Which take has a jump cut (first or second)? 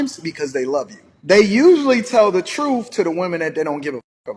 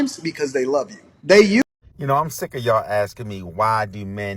second